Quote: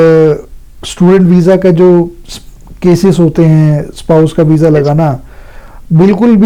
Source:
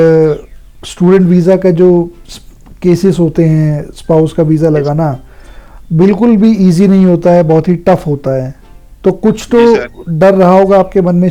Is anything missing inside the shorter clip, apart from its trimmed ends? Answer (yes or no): no